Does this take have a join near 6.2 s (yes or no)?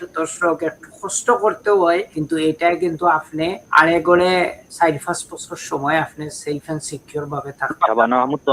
no